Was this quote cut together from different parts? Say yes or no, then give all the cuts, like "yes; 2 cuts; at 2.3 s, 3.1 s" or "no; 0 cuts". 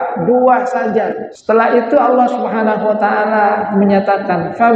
yes; 1 cut; at 1.3 s